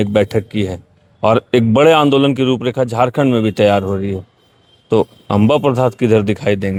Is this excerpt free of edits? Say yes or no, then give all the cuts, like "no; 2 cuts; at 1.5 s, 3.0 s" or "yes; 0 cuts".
yes; 0 cuts